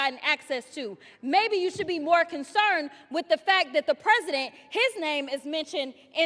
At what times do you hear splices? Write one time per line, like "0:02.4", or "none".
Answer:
none

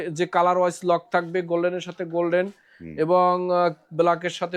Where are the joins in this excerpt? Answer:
none

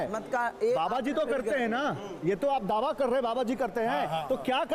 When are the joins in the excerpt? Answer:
none

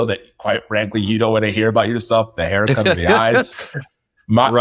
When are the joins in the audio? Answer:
none

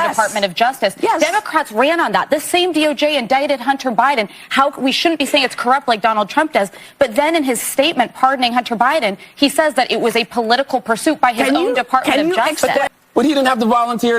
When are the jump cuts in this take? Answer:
0:12.8

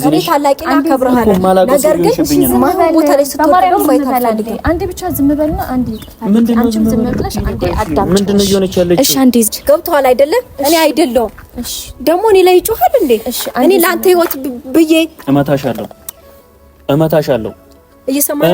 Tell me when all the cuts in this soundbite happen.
0:09.5

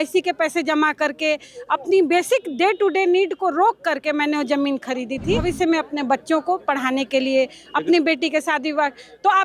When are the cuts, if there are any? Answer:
0:05.4

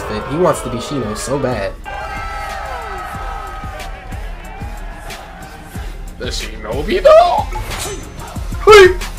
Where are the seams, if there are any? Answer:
none

